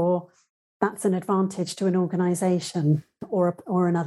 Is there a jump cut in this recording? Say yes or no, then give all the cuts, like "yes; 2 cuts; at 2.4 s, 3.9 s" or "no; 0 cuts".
no; 0 cuts